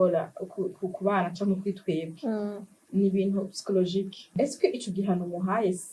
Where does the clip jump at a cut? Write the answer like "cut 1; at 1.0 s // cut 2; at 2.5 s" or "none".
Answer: cut 1; at 4.3 s